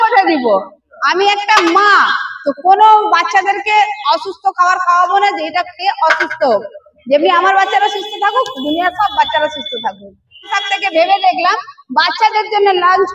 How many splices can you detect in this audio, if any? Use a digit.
1